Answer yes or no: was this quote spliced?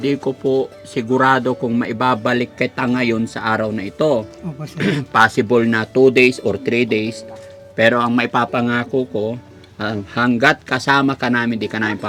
no